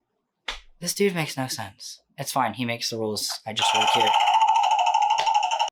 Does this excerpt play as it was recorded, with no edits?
yes; 0 cuts

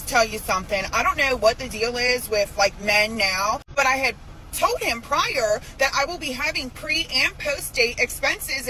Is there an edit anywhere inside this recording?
no; 0 cuts

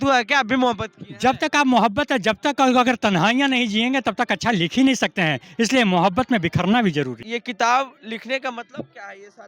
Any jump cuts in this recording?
yes; 1 cut; at 7.2 s

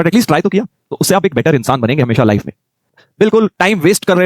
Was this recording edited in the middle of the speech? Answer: yes; 1 cut; at 3.0 s

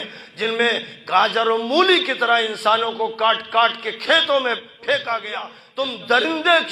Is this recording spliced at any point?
yes; 1 cut; at 5.6 s

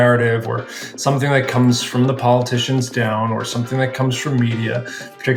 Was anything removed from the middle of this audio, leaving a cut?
no; 0 cuts

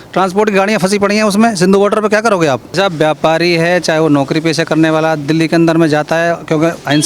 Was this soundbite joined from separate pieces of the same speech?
yes; 1 cut; at 2.7 s

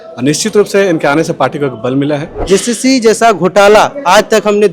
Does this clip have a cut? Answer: yes; 1 cut; at 2.3 s

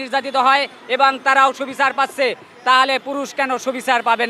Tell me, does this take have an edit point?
no; 0 cuts

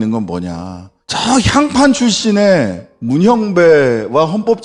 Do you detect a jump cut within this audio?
no; 0 cuts

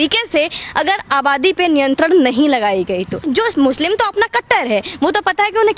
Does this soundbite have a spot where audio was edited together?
yes; 1 cut; at 3.2 s

